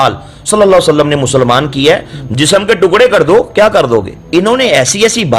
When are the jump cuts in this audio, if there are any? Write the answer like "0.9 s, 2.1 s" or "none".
4.2 s